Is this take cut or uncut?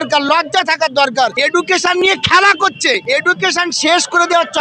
cut